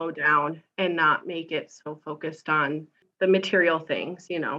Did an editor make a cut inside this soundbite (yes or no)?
yes